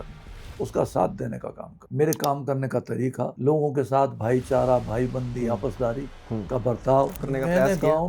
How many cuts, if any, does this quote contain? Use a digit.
2